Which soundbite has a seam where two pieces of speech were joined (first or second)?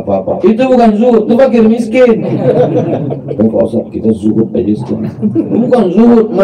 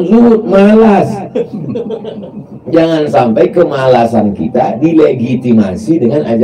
first